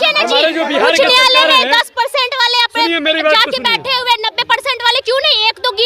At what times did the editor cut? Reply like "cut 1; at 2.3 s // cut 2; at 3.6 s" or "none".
none